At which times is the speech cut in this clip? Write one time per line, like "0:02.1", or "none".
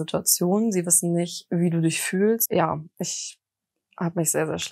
0:02.4